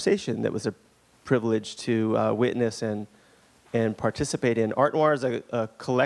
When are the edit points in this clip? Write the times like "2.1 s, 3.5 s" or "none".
3.0 s